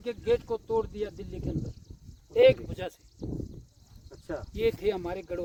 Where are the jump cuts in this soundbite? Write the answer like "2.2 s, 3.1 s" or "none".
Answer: none